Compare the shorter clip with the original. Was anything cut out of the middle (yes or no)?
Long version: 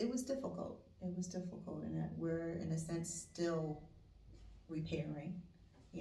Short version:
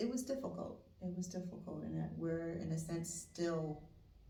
no